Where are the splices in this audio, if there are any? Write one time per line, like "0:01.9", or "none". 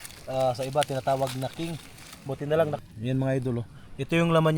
0:02.8

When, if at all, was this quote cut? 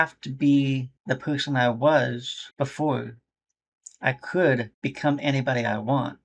0:00.9
0:02.4
0:04.7

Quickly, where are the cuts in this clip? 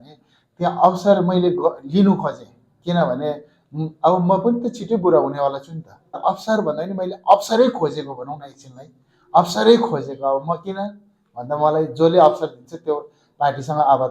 0:06.2

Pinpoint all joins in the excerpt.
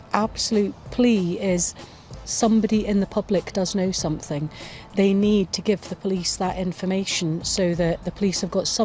none

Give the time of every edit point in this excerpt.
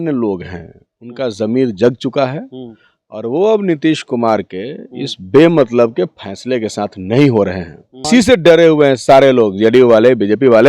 0:08.1

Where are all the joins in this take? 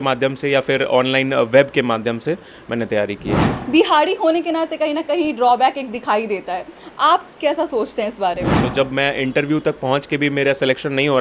0:03.5
0:08.6

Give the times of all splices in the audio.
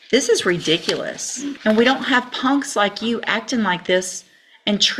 0:01.5

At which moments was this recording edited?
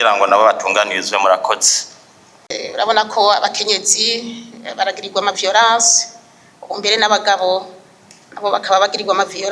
0:02.5

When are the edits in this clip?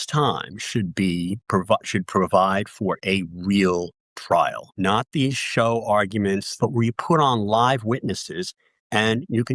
0:04.6
0:06.5

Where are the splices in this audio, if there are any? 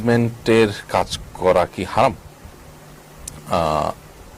none

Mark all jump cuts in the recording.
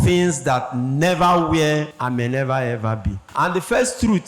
0:01.9
0:03.2

